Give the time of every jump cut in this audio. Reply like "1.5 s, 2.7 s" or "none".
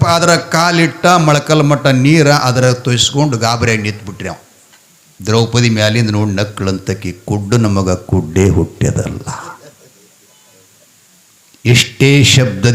none